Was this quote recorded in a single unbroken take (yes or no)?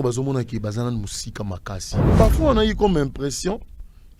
no